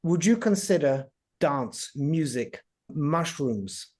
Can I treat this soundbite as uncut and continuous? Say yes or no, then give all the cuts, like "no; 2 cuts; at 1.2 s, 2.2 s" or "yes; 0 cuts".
no; 1 cut; at 2.9 s